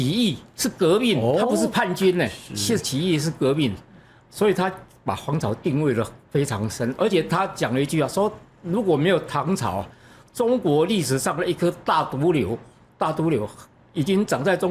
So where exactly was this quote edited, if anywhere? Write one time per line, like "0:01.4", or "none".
none

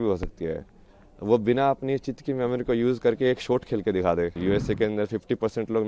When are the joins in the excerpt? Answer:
0:04.4

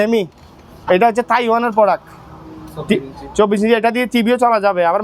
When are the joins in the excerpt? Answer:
none

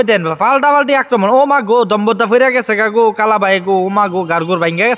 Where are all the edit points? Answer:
none

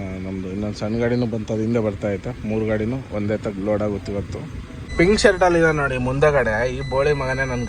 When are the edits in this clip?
0:04.9

